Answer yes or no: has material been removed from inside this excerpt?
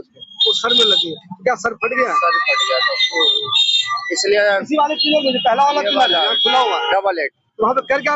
no